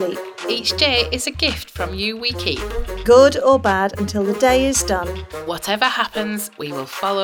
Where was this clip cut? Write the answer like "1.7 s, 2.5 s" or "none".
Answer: none